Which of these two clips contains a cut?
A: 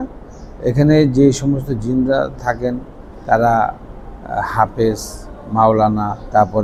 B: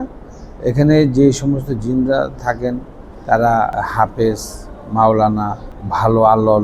B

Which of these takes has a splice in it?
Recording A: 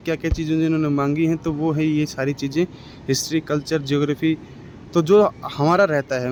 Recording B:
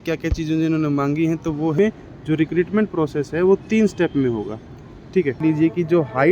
B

